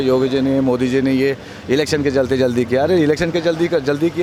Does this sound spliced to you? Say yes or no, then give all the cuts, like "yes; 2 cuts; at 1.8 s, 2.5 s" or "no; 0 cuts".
no; 0 cuts